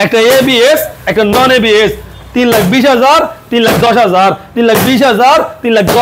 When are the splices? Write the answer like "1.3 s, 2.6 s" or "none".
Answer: none